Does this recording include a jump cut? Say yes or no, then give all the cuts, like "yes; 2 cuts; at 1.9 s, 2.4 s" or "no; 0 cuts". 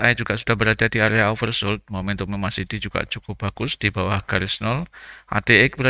no; 0 cuts